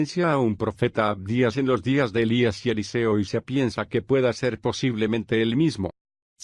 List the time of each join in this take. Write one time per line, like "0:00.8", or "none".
0:04.8